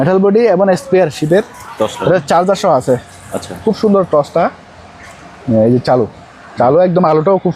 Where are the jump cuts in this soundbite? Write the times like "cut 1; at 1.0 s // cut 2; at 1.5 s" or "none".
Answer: none